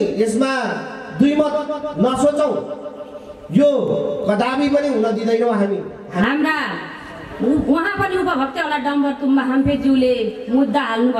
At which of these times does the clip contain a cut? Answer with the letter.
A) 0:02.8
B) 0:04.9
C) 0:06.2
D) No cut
C